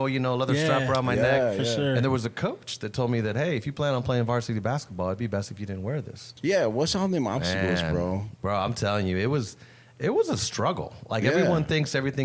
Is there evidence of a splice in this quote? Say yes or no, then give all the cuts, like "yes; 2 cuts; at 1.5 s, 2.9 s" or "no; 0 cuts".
yes; 1 cut; at 6.3 s